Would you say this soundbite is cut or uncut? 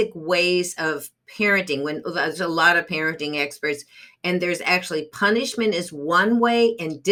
uncut